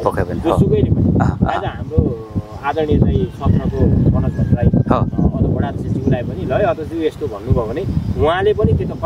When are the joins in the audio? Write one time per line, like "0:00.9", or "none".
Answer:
none